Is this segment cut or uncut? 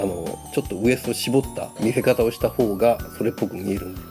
cut